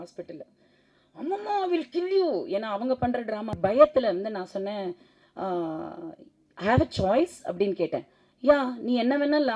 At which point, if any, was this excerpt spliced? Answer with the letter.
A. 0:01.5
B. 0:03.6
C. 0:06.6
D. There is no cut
B